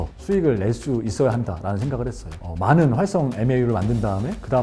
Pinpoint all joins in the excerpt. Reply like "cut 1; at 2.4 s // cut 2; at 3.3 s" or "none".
none

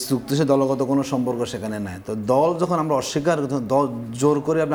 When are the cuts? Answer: none

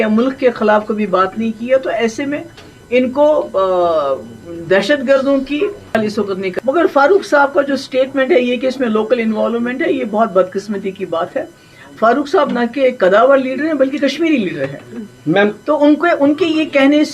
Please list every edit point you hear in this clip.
cut 1; at 5.8 s

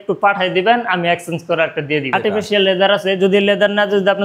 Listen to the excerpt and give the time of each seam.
cut 1; at 2.1 s

